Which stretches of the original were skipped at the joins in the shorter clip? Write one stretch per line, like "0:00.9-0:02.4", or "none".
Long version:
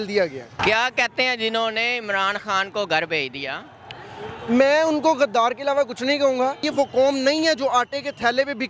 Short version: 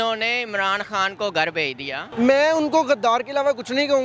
0:03.6-0:04.4